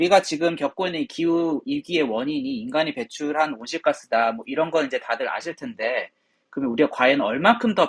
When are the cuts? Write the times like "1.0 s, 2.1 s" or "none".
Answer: none